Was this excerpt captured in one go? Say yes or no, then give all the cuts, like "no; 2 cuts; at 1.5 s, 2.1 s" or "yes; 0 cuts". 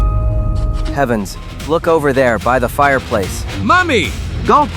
no; 1 cut; at 0.9 s